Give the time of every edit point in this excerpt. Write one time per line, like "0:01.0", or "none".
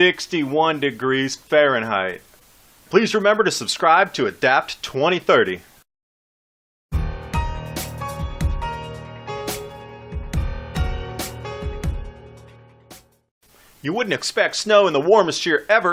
0:12.8